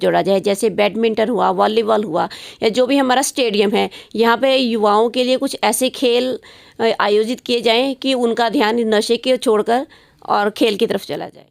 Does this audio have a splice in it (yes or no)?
no